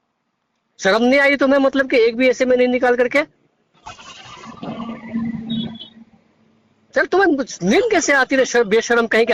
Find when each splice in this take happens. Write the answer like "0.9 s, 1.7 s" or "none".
none